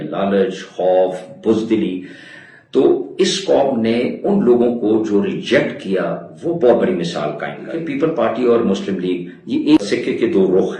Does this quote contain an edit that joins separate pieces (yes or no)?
yes